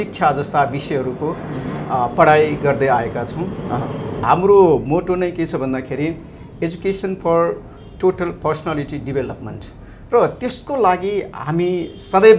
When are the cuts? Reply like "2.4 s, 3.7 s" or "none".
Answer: 4.2 s